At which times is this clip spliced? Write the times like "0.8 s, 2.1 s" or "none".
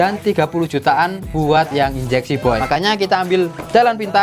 2.6 s